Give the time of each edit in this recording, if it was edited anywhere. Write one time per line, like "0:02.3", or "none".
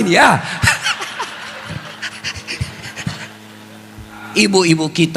0:04.2